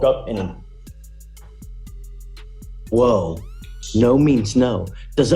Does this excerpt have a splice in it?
yes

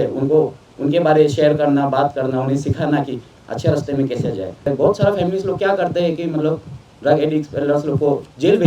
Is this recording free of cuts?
no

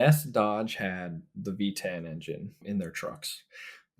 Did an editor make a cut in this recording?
yes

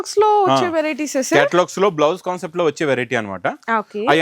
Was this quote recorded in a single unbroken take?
yes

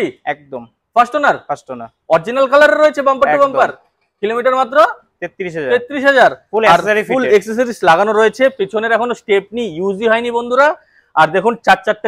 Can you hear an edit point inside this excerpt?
no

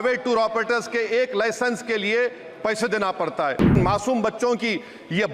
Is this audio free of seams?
no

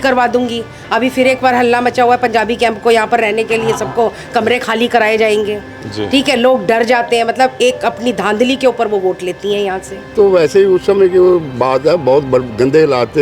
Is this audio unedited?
no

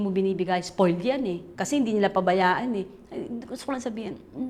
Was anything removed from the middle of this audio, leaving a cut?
yes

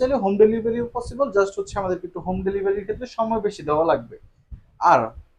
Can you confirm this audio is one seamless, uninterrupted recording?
yes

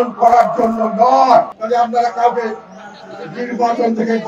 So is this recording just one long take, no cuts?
no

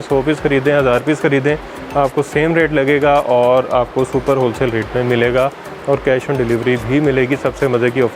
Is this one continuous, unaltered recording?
yes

